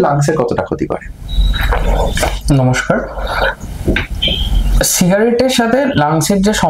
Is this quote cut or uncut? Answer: uncut